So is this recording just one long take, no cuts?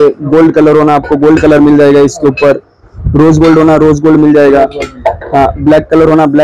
yes; 0 cuts

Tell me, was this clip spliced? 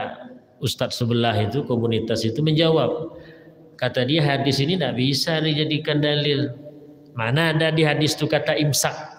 no; 0 cuts

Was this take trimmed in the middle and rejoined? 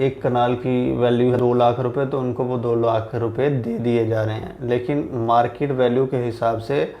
yes; 1 cut; at 1.4 s

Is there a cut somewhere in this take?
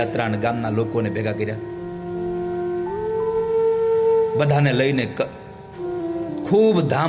no; 0 cuts

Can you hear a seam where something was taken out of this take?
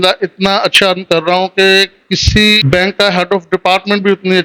yes; 1 cut; at 2.6 s

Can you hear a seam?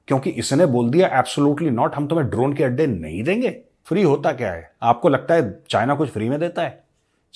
yes; 1 cut; at 3.7 s

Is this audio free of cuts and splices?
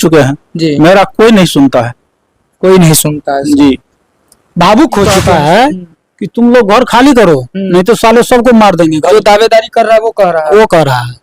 no; 1 cut; at 5.2 s

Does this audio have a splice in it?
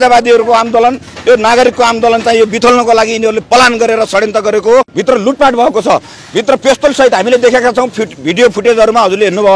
yes; 1 cut; at 4.9 s

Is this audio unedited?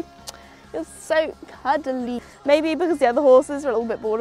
no; 1 cut; at 2.2 s

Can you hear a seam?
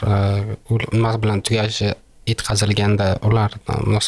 no; 0 cuts

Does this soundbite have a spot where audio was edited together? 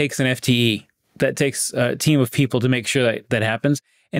no; 0 cuts

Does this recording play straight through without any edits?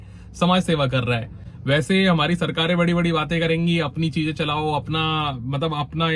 yes; 0 cuts

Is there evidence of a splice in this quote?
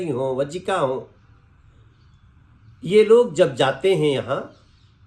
no; 0 cuts

